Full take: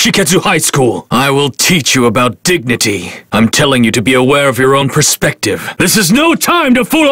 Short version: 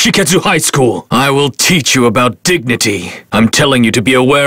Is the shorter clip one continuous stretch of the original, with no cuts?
yes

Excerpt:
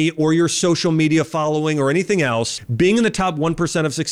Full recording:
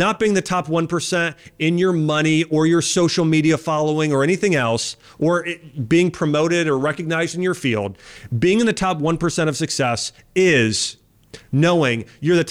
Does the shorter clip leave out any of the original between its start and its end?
yes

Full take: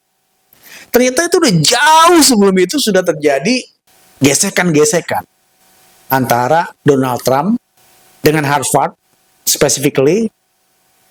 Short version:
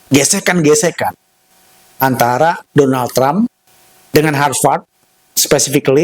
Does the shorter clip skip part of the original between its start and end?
no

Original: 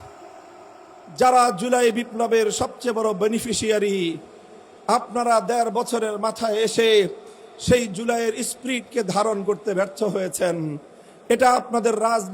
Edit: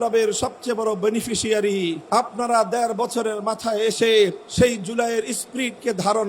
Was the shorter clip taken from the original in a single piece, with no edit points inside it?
no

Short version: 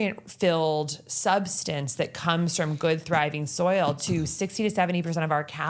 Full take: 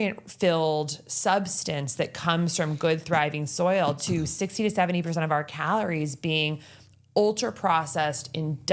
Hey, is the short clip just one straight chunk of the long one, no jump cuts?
yes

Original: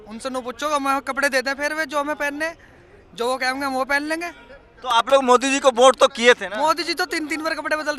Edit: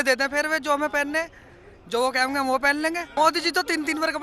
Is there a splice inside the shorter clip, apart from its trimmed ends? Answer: yes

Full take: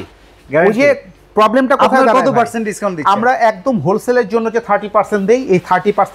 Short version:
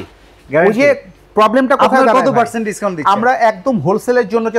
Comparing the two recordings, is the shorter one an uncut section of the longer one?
yes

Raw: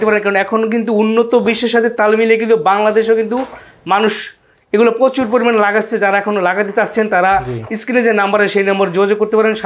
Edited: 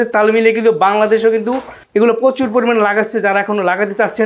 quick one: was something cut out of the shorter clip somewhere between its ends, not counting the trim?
yes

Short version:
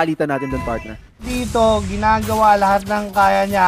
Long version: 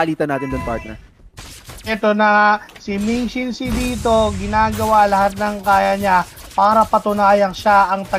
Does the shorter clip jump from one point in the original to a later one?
yes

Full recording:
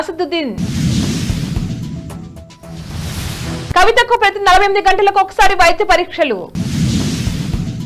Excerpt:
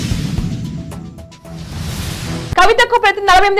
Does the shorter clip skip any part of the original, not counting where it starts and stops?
no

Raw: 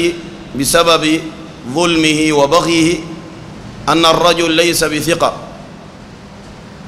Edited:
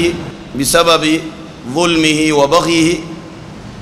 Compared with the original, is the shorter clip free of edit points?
yes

